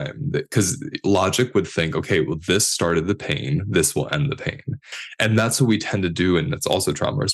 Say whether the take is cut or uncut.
cut